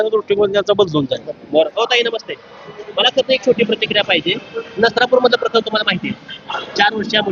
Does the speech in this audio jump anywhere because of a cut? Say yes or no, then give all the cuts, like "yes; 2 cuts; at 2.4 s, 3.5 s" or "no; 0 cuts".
no; 0 cuts